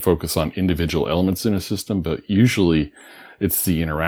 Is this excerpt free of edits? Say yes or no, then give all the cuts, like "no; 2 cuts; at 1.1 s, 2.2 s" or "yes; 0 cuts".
yes; 0 cuts